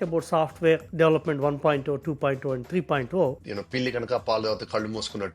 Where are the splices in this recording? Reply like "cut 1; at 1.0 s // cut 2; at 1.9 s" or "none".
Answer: cut 1; at 3.4 s